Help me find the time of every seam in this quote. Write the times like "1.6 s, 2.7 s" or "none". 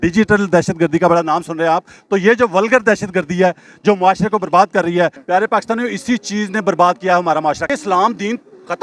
5.2 s, 7.7 s